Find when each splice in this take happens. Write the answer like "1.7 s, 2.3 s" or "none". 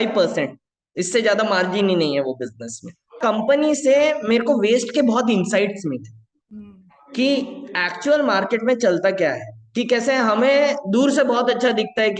3.2 s